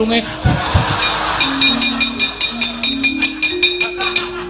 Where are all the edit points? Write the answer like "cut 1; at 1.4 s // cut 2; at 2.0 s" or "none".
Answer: none